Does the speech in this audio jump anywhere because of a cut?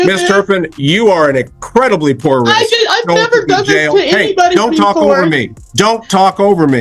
no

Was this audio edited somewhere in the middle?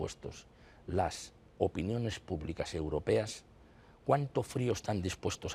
no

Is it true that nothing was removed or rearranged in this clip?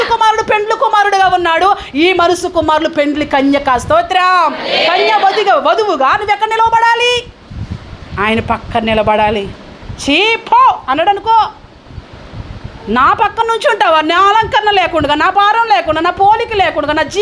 yes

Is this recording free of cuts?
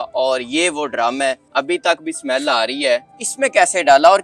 no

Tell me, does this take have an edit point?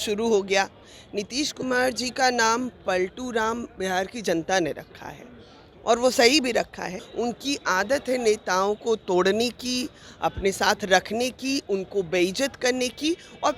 yes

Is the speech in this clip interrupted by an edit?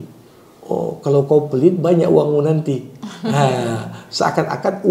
no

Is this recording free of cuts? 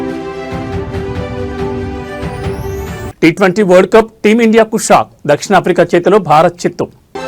no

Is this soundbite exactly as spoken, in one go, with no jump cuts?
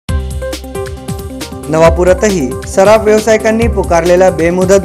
no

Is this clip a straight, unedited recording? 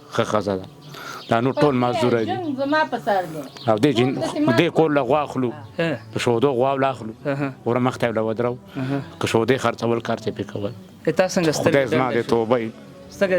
yes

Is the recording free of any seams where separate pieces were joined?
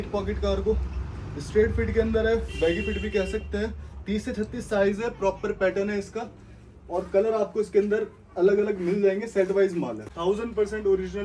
no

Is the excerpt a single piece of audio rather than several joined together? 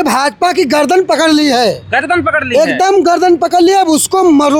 yes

